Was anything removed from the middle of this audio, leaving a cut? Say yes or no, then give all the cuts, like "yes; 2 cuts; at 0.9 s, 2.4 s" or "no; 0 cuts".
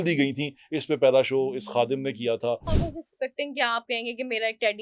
yes; 1 cut; at 2.8 s